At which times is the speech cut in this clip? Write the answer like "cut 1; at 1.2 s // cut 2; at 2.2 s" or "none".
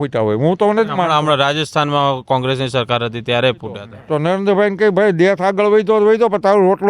cut 1; at 3.9 s